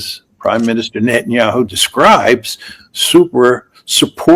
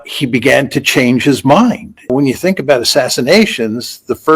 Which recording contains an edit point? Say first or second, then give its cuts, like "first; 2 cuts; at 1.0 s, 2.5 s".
second; 1 cut; at 2.1 s